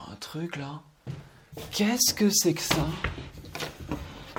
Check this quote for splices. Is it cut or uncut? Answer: uncut